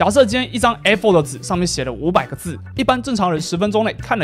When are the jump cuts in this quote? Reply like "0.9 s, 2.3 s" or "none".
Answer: none